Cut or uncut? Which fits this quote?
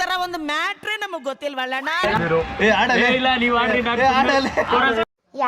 cut